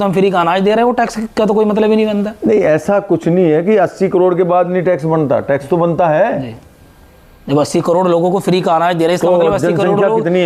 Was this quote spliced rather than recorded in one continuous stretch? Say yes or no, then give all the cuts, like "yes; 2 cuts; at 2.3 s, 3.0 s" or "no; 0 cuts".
no; 0 cuts